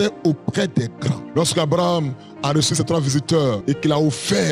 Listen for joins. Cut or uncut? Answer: cut